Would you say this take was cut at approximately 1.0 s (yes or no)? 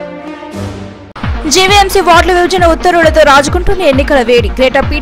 yes